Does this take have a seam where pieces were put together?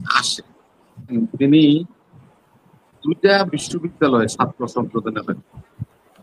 yes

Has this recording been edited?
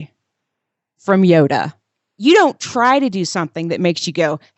yes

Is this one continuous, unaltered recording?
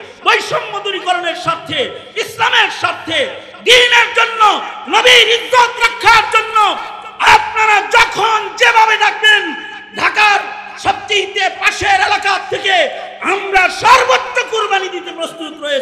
yes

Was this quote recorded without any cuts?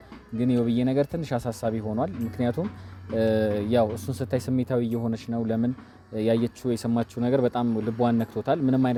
yes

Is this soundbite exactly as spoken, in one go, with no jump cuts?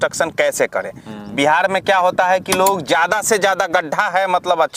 yes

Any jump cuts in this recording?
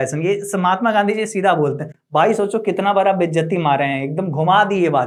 no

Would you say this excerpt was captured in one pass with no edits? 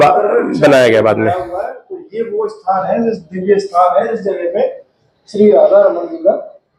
yes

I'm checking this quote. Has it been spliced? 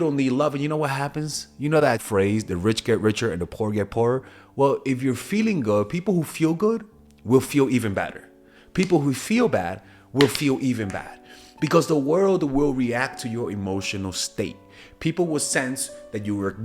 yes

